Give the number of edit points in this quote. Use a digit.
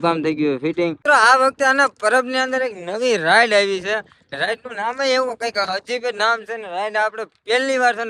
1